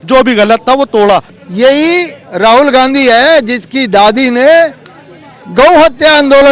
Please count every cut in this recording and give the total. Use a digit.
1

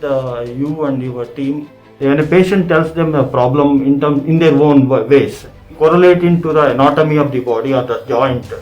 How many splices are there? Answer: 2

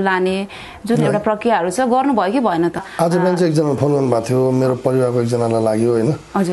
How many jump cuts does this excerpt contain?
1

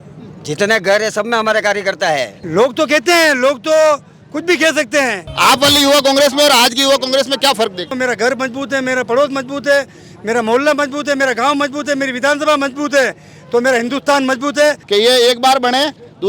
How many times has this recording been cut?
4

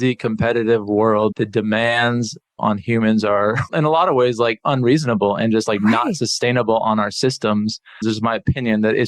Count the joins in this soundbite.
4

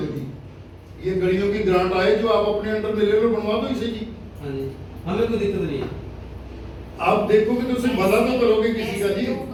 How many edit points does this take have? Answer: 0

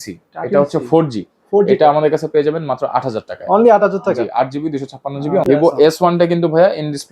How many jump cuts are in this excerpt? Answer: 1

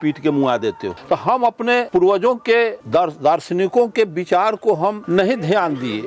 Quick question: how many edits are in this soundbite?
4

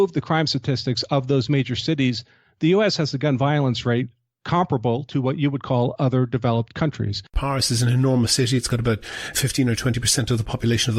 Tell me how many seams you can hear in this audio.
1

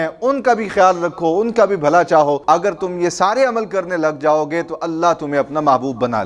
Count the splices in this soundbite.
1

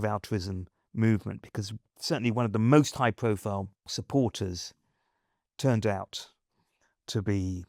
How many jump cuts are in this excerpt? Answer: 2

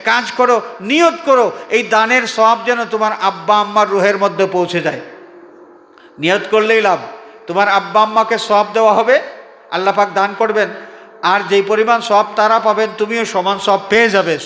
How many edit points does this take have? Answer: 0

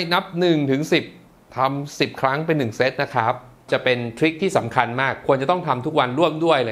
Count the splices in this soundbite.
1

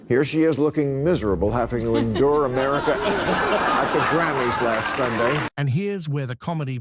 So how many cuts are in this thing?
0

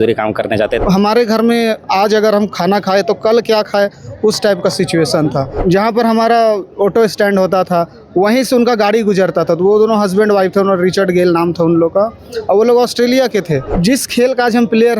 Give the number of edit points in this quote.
3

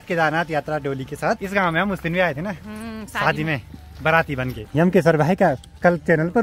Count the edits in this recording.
0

